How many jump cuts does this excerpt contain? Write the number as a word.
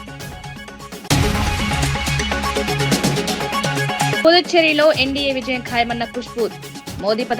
two